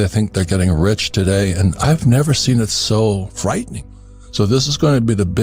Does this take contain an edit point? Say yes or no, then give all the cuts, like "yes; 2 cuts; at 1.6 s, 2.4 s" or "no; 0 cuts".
yes; 1 cut; at 3.7 s